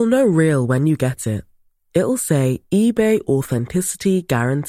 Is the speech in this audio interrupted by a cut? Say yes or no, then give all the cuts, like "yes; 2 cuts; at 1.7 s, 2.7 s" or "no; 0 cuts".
no; 0 cuts